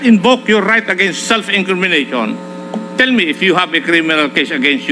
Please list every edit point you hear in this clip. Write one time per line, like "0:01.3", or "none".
none